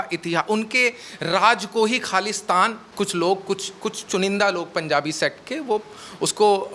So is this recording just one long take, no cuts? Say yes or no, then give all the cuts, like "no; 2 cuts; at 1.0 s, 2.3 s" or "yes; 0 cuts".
no; 1 cut; at 2.8 s